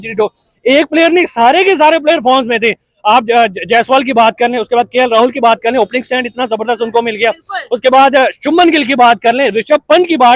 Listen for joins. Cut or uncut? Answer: uncut